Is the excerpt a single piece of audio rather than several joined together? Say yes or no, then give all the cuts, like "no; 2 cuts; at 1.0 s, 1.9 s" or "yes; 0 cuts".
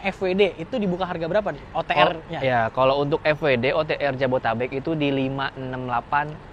yes; 0 cuts